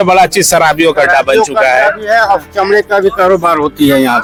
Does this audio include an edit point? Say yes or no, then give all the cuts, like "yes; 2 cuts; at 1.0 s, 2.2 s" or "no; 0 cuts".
no; 0 cuts